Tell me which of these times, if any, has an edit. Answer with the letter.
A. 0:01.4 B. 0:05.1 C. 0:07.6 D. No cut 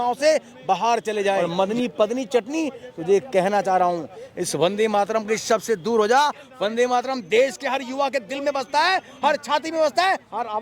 A